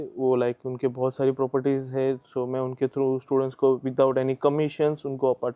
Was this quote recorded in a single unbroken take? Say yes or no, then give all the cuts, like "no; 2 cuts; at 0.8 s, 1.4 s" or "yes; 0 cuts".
yes; 0 cuts